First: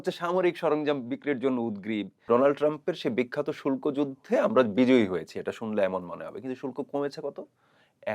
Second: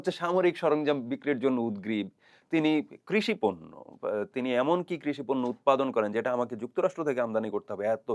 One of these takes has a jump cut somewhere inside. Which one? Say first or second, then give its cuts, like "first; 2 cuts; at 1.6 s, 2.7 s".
first; 1 cut; at 2.2 s